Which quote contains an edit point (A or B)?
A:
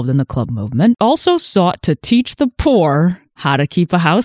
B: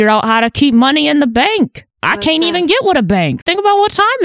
A